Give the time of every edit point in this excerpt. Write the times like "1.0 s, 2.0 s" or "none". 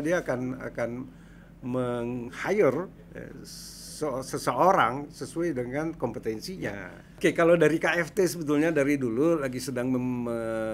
7.0 s